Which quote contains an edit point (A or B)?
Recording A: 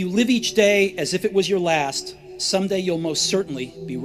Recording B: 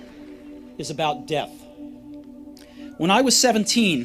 B